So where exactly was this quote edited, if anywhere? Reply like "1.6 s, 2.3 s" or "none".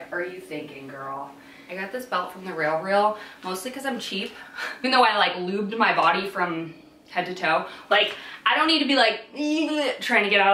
1.5 s, 4.7 s, 7.9 s

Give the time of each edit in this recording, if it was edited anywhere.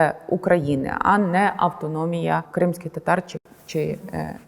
2.5 s

